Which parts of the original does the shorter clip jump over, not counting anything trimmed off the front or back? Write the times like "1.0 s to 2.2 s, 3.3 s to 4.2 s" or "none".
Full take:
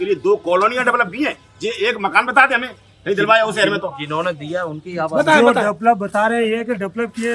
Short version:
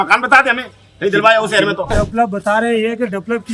4.0 s to 5.6 s